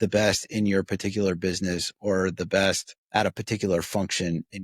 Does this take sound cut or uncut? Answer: cut